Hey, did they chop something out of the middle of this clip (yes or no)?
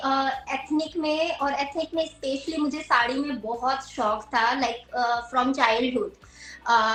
no